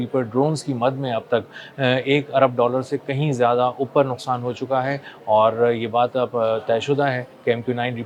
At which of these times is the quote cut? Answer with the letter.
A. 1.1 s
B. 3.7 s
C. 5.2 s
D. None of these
D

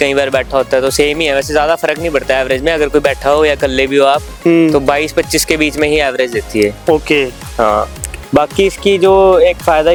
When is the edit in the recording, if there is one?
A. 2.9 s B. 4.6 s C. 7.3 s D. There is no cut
D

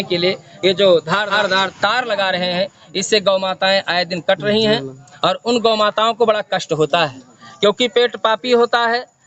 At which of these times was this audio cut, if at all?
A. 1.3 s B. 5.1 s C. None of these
C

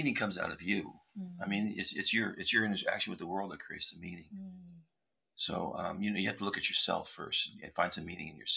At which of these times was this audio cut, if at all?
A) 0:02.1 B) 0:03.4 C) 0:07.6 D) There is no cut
D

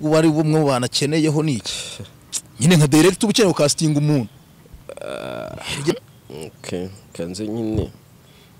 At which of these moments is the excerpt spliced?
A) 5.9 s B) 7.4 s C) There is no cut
A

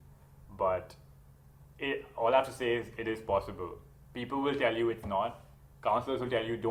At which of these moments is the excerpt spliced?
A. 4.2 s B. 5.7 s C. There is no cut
C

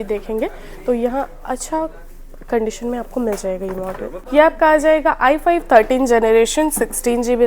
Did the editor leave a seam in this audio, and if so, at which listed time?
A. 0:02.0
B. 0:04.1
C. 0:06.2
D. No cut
B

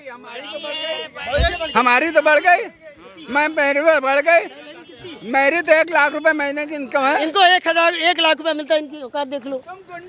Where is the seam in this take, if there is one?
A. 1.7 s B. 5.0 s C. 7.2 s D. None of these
C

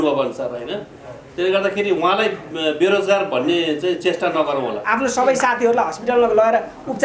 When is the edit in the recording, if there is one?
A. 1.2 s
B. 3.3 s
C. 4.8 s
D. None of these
C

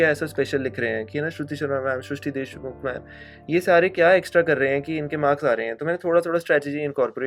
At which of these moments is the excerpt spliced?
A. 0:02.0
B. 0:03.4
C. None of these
C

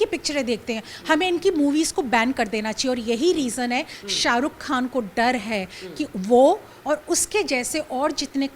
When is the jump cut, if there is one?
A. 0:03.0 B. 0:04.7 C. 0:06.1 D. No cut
D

